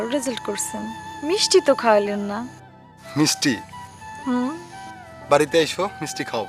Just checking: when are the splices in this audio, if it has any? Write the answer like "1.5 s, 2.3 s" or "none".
none